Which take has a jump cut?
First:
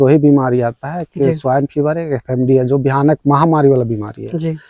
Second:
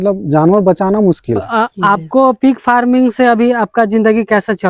second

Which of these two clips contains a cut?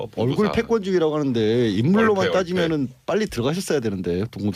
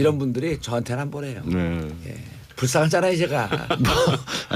second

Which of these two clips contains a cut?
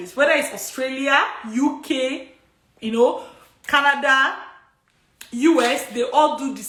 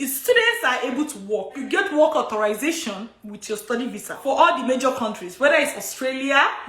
second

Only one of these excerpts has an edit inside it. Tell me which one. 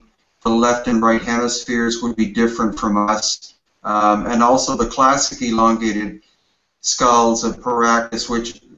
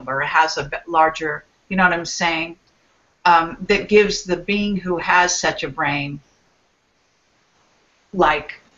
first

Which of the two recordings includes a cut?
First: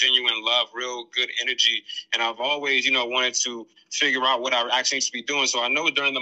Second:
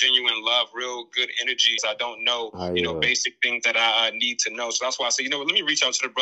second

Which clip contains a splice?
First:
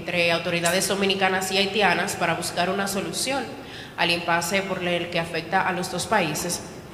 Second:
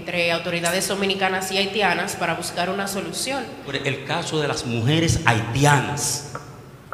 second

